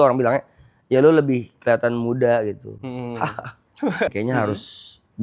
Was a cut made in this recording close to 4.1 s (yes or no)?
yes